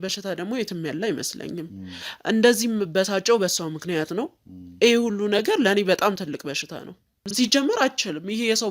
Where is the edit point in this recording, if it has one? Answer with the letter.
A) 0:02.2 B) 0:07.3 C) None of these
B